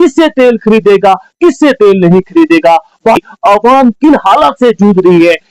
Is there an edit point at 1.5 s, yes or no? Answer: no